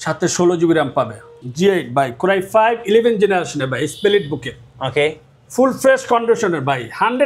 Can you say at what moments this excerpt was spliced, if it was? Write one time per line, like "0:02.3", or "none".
0:01.4